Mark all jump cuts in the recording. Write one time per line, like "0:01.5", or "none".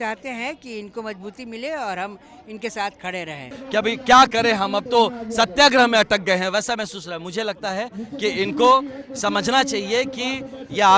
0:03.6